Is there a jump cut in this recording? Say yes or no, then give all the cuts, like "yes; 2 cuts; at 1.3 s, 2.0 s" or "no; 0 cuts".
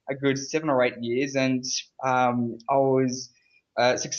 no; 0 cuts